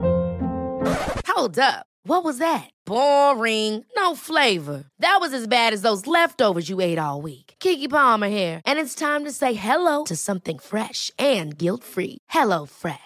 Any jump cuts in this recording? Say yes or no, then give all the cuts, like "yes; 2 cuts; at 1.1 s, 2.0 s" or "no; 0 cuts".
no; 0 cuts